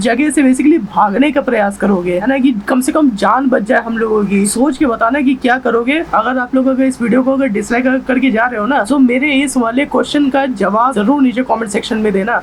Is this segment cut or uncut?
uncut